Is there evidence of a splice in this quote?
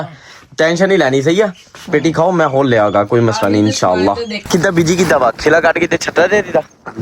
yes; 1 cut; at 4.5 s

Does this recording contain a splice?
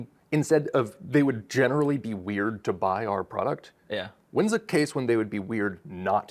no; 0 cuts

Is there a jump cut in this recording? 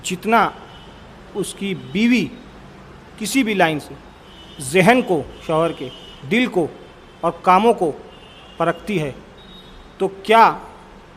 no; 0 cuts

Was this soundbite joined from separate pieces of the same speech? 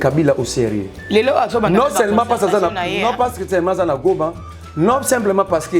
no; 0 cuts

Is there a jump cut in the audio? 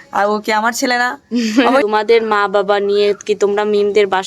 yes; 1 cut; at 1.9 s

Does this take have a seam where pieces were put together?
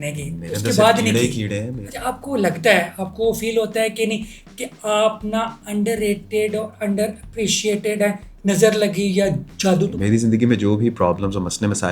yes; 3 cuts; at 1.8 s, 8.3 s, 9.9 s

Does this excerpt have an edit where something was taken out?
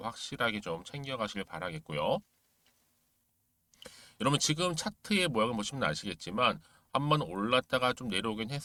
no; 0 cuts

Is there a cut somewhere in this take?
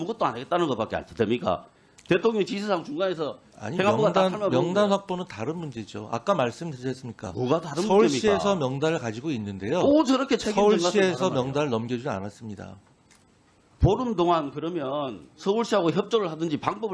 yes; 1 cut; at 13.6 s

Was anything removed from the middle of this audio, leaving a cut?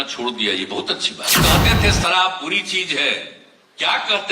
yes; 1 cut; at 1.4 s

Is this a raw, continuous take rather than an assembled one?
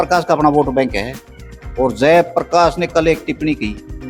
yes; 0 cuts

